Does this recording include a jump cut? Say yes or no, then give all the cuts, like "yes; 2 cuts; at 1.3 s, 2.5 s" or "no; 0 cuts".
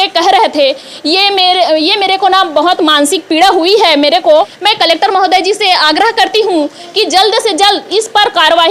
yes; 1 cut; at 4.5 s